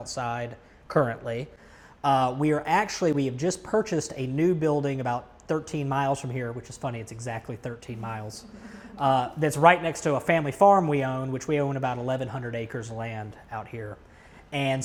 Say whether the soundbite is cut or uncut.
uncut